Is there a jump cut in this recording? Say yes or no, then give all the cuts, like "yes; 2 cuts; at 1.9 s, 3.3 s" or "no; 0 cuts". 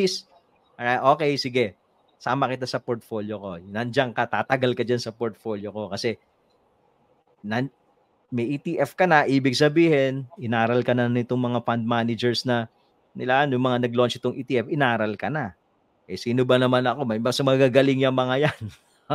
no; 0 cuts